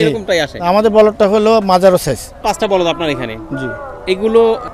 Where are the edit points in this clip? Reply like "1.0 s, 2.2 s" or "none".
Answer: 2.4 s